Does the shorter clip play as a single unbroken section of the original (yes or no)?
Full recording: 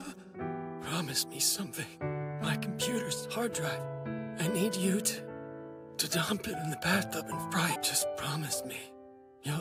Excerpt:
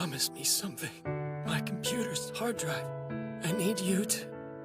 yes